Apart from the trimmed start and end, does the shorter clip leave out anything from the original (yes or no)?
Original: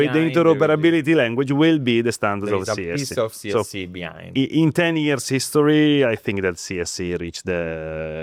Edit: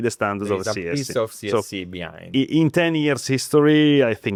no